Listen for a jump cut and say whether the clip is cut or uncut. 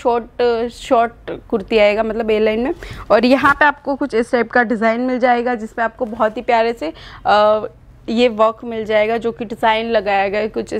uncut